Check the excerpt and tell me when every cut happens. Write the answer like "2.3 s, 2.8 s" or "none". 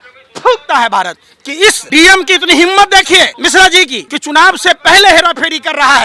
1.8 s, 3.7 s